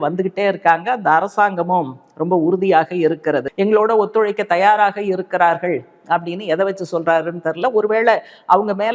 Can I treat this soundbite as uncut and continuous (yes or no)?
no